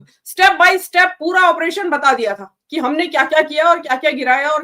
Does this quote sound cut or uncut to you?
uncut